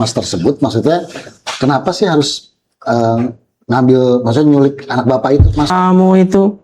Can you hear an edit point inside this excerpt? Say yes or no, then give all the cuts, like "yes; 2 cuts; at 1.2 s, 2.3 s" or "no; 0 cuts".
yes; 1 cut; at 5.7 s